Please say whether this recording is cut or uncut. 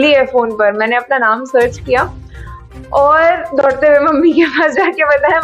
uncut